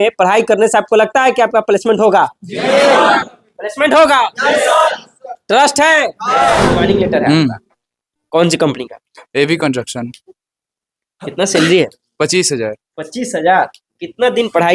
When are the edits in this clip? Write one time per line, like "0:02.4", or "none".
0:06.8